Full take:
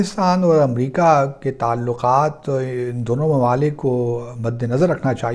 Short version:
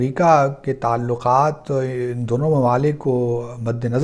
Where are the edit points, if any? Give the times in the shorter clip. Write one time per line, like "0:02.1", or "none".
none